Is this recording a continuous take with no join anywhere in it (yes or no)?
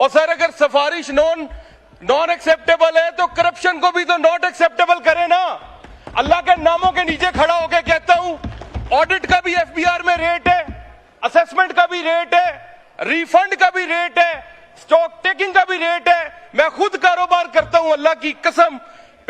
yes